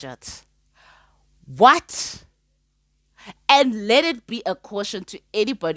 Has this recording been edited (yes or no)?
no